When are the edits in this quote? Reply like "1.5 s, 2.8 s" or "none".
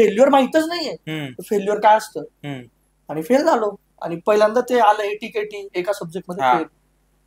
none